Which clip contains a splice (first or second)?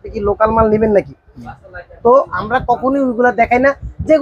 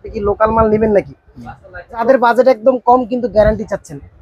second